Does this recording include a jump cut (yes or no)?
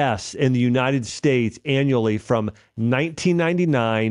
no